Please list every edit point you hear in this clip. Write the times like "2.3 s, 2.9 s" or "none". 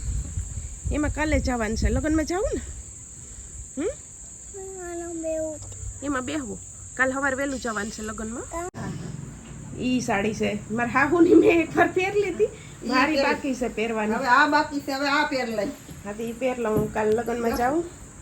8.9 s